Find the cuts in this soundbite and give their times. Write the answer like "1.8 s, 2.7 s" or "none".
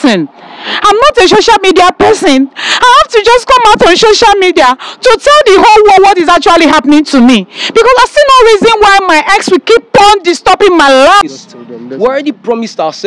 11.2 s